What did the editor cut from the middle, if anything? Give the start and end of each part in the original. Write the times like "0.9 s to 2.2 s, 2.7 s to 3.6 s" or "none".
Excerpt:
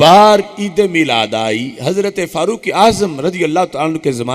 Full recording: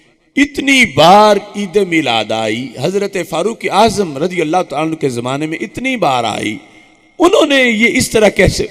none